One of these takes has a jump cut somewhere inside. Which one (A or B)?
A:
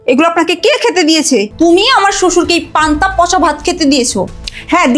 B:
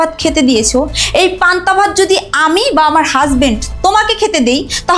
A